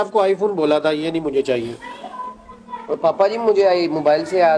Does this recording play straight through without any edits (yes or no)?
yes